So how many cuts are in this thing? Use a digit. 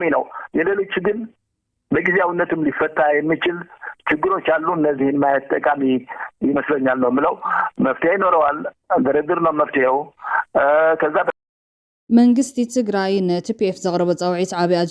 1